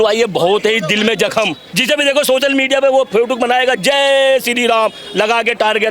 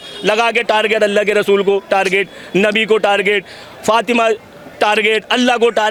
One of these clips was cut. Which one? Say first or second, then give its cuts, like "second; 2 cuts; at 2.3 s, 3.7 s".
first; 1 cut; at 1.7 s